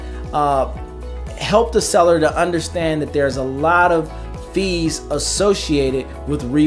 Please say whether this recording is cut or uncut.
uncut